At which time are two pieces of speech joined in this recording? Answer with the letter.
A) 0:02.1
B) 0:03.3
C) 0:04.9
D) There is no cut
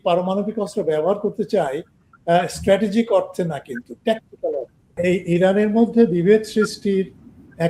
C